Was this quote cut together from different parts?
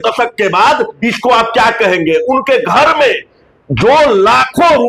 no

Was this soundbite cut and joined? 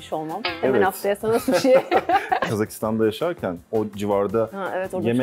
yes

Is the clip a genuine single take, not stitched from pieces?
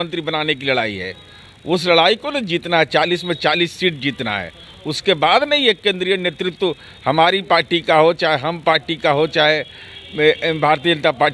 yes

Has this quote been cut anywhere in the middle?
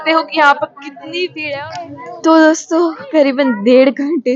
yes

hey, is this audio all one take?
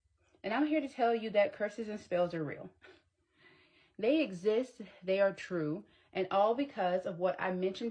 yes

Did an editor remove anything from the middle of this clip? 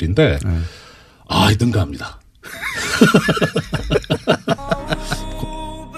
yes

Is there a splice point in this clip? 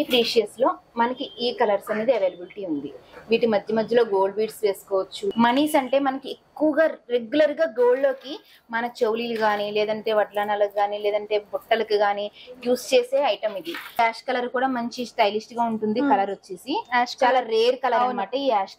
yes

